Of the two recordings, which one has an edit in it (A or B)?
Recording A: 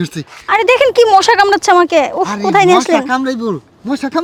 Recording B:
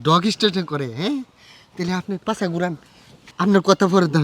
B